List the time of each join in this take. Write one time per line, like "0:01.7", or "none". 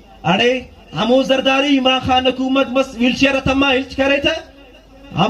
none